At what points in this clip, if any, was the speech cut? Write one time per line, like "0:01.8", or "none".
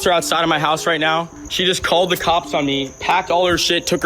0:01.4